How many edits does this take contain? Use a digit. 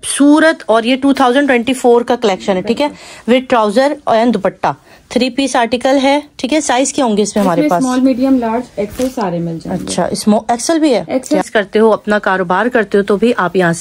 1